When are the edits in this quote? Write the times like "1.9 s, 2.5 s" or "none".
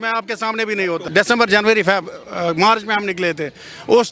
1.1 s

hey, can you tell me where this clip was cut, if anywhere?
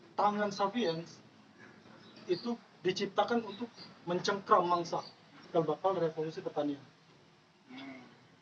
5.5 s

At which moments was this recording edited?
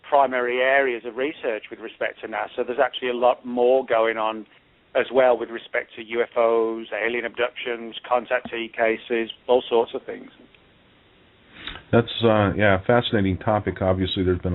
3.0 s

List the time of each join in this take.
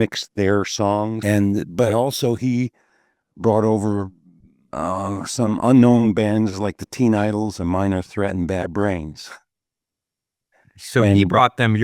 1.2 s

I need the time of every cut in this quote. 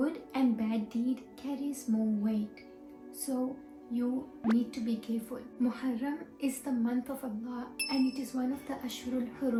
none

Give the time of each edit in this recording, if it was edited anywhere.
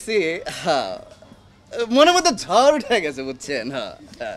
none

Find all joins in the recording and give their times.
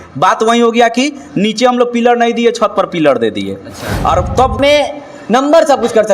4.6 s

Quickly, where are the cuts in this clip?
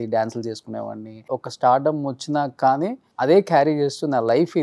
1.2 s, 3.0 s

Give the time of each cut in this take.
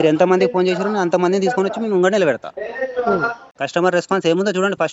3.4 s

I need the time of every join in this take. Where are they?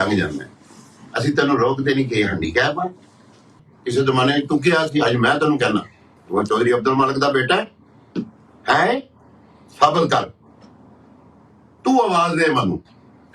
3.7 s

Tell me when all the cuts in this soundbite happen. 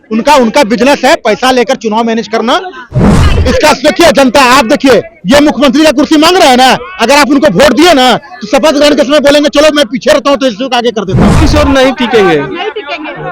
3.2 s, 11.4 s

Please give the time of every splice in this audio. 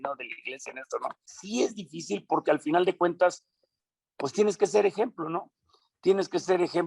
1.3 s

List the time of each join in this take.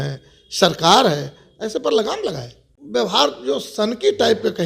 2.7 s

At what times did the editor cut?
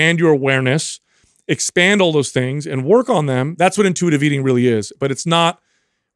3.5 s

